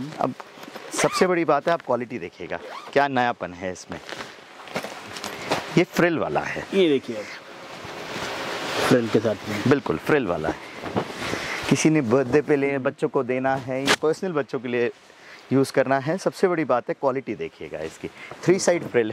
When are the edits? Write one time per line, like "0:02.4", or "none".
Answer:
none